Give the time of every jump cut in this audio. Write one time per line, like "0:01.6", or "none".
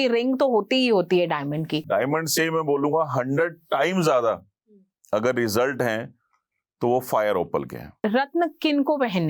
0:01.8
0:08.0